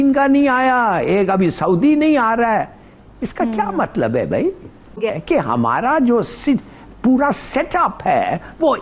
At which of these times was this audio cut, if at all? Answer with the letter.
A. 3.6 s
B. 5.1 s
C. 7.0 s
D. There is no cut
B